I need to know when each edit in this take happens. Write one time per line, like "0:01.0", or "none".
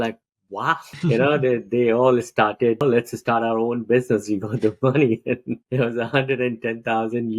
0:00.9
0:02.8
0:05.7

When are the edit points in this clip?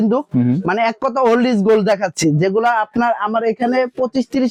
none

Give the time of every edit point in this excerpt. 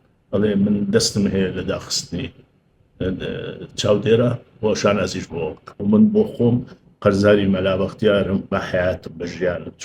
0:05.7

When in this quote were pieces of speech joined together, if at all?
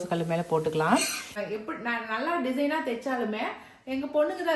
0:01.2

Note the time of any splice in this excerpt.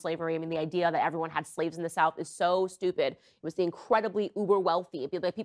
0:03.1

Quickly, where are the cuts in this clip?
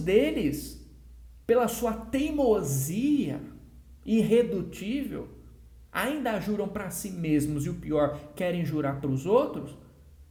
none

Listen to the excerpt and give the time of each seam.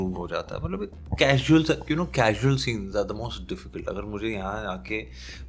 none

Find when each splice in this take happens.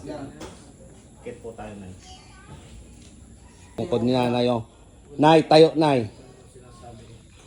0:03.8

